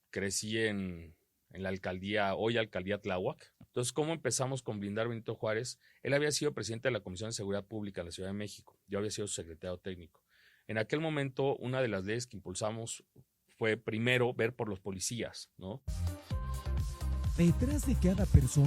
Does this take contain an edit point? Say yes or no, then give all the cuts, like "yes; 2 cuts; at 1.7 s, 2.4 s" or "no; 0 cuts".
yes; 2 cuts; at 3.5 s, 16.0 s